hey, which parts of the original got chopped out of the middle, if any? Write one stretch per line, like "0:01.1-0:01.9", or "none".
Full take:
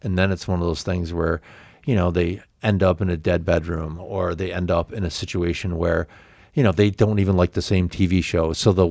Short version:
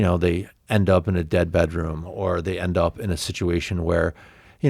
none